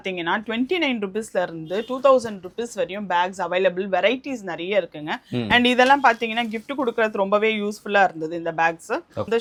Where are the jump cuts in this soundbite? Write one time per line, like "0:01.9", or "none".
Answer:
none